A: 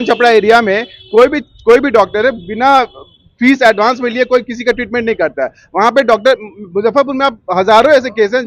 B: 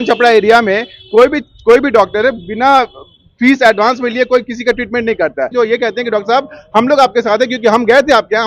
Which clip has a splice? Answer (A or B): B